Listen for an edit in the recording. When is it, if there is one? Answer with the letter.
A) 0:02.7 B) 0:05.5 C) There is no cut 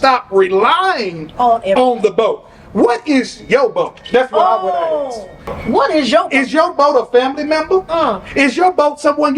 B